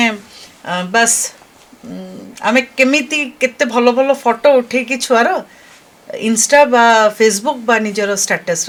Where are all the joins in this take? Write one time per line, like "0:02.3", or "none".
none